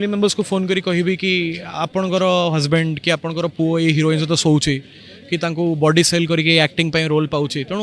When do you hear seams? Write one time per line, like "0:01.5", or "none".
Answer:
none